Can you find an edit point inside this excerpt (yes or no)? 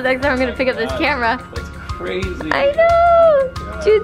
no